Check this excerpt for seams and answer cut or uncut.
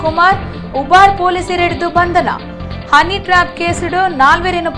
uncut